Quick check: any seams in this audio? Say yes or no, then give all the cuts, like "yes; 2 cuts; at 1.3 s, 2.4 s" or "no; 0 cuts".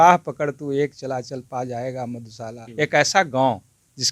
yes; 1 cut; at 2.6 s